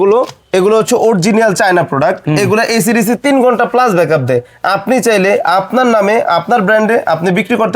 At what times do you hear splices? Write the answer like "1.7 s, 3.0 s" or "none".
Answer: none